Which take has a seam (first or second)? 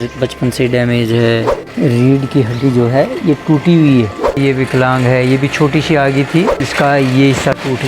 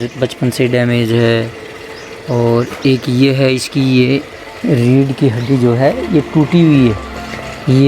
first